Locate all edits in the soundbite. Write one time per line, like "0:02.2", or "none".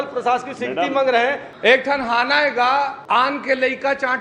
0:01.5
0:03.0